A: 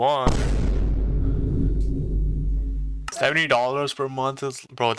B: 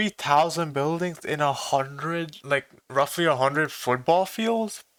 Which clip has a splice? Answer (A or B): A